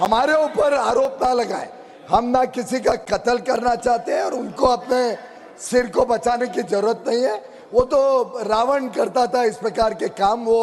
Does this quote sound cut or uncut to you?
uncut